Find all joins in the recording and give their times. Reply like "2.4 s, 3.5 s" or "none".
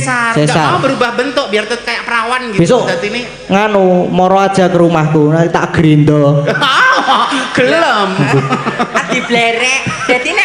none